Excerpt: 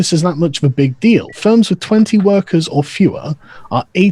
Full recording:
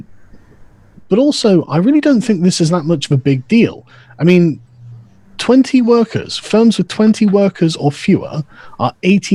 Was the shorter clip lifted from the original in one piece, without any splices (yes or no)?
no